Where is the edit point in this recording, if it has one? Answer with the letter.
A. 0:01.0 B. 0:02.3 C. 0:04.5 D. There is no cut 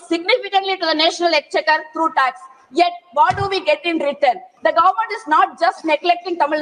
C